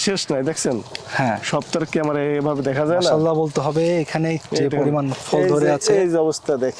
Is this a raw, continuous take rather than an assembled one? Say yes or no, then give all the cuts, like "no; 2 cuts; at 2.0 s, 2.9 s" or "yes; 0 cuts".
yes; 0 cuts